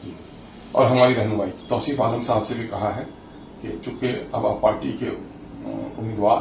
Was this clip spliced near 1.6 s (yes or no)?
yes